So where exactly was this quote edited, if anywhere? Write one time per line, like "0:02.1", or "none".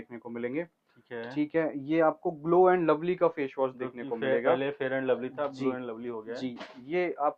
none

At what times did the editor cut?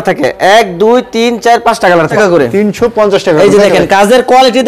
0:02.1

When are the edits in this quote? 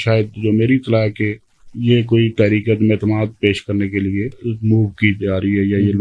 0:04.4

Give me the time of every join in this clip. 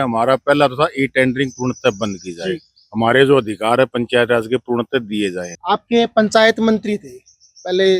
0:05.5

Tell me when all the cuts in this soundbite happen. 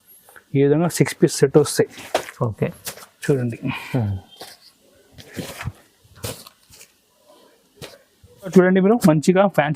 0:08.5

